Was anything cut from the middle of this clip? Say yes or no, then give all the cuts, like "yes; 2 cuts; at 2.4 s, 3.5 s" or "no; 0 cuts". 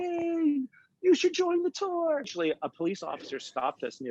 yes; 1 cut; at 2.3 s